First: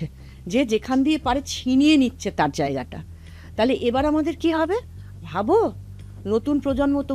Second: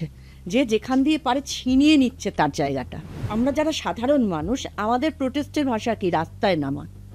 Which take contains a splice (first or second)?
second